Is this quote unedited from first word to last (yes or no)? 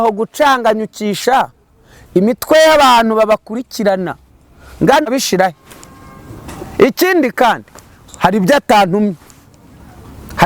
no